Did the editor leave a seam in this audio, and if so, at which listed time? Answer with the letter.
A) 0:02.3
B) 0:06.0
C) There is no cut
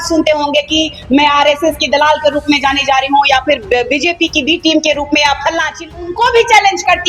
B